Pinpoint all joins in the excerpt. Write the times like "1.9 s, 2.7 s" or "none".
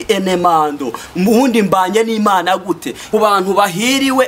2.9 s